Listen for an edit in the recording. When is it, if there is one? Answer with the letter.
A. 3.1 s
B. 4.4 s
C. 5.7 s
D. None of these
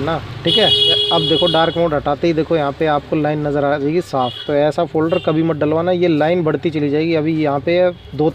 B